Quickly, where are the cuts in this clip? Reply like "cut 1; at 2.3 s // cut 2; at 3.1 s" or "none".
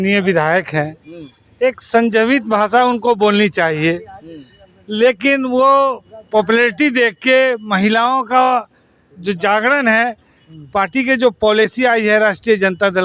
none